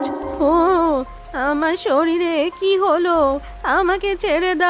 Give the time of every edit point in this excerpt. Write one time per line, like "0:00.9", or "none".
none